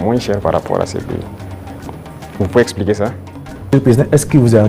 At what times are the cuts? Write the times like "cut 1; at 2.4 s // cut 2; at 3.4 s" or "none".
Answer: cut 1; at 3.7 s